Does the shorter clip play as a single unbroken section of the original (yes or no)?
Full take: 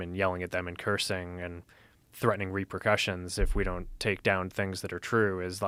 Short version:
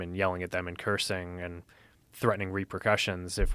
yes